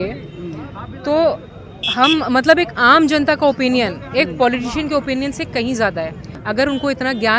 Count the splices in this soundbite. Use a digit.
1